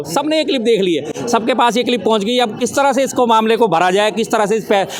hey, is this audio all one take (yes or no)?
yes